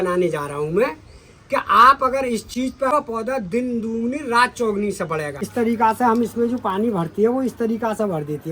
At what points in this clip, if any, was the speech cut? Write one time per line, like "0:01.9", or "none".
0:02.9
0:05.5